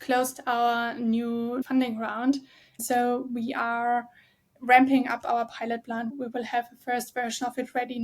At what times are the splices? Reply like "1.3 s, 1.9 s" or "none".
1.6 s, 2.8 s, 6.1 s